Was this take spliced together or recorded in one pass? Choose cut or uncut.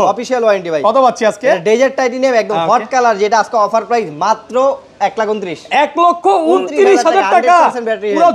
uncut